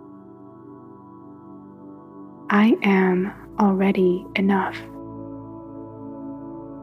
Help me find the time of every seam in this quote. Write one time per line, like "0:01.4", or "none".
0:02.5
0:04.7